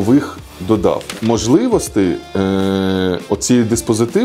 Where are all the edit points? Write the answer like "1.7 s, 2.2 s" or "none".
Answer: 1.2 s